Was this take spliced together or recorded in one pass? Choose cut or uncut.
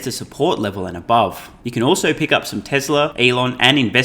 cut